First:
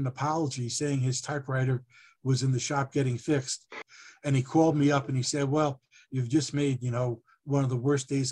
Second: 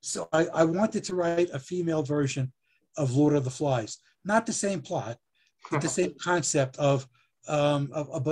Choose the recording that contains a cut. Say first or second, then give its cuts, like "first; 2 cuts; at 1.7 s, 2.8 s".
first; 1 cut; at 3.6 s